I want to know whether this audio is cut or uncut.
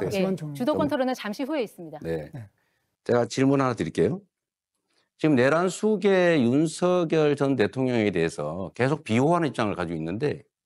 uncut